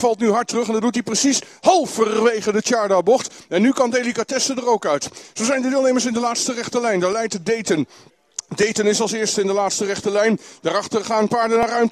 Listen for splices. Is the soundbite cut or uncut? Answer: uncut